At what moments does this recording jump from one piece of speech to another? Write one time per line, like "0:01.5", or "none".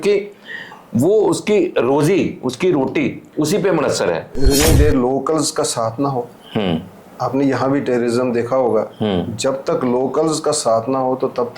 0:04.5